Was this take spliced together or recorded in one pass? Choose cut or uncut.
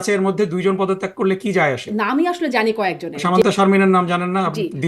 cut